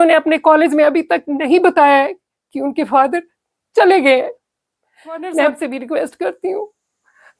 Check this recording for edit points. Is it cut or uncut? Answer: uncut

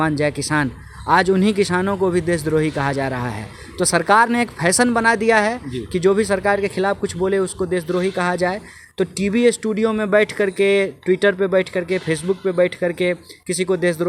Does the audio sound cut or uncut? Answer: uncut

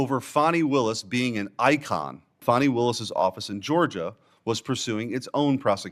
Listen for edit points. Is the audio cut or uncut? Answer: cut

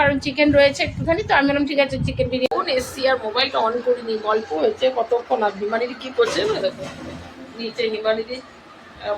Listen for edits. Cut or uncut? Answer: cut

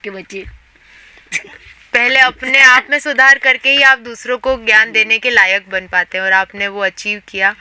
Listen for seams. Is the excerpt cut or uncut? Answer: uncut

